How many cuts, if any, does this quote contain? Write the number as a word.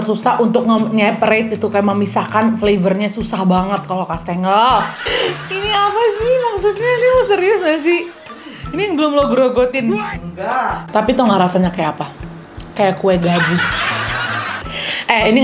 three